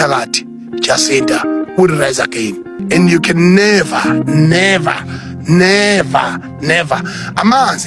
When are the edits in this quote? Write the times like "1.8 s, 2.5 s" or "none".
2.8 s